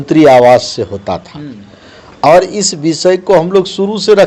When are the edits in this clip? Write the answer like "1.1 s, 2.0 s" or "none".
none